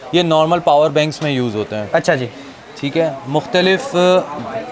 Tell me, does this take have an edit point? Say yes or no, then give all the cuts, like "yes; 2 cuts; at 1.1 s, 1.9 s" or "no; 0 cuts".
no; 0 cuts